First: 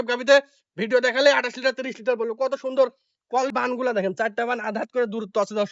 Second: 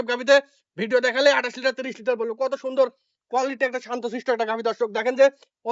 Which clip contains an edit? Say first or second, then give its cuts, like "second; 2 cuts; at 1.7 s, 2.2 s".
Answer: first; 1 cut; at 3.5 s